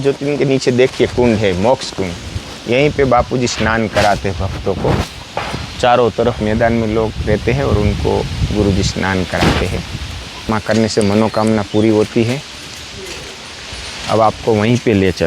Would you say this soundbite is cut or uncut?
cut